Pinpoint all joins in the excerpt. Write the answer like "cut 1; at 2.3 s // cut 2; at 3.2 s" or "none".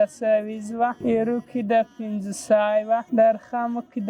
cut 1; at 1.0 s // cut 2; at 3.1 s